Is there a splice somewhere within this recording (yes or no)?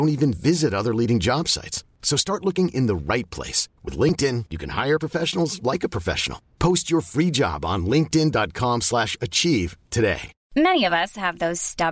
yes